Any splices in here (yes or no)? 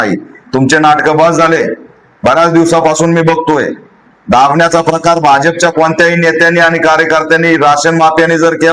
no